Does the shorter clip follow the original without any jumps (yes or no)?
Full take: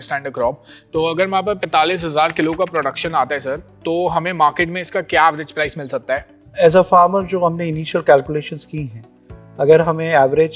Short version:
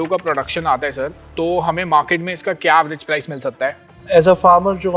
yes